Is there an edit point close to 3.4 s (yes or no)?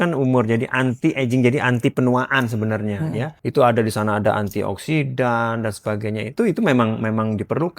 yes